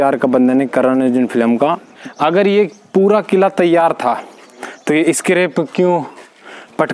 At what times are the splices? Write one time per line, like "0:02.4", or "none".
0:01.9